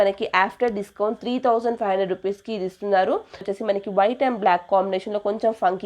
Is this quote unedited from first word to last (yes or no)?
no